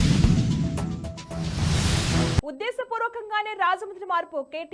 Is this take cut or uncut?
uncut